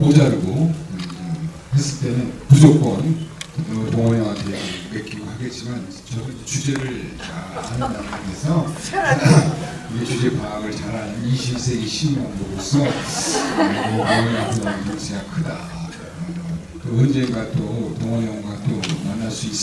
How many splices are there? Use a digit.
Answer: 0